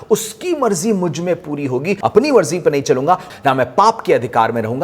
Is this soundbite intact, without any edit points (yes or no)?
no